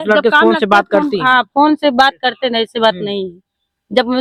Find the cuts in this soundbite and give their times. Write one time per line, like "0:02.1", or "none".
none